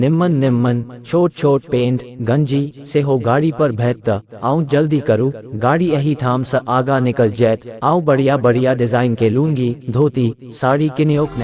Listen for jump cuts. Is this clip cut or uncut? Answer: uncut